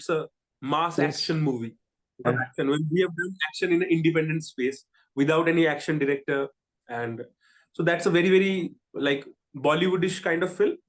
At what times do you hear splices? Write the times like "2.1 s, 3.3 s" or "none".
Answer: 2.3 s

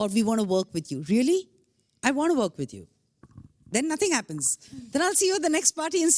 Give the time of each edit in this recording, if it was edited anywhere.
none

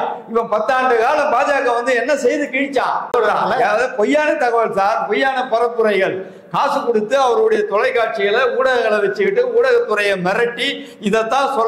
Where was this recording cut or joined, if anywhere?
3.1 s

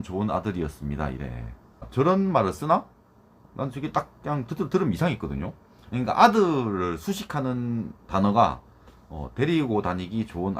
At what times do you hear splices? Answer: 1.9 s

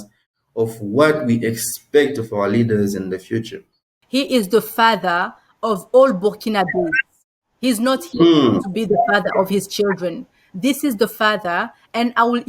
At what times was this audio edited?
4.0 s

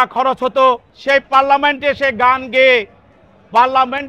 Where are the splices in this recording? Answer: 0.9 s

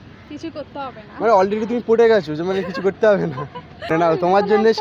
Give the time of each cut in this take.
3.6 s

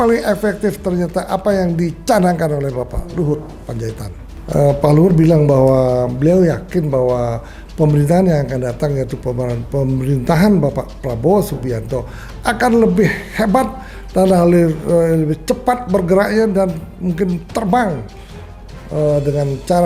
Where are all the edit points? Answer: 4.3 s

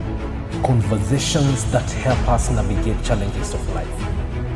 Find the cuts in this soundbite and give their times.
none

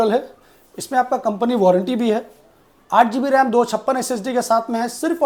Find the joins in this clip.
none

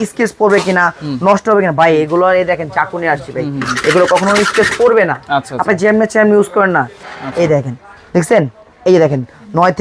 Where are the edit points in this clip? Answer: 7.0 s

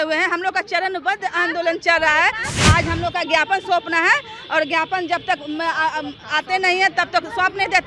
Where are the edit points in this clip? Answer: 2.6 s

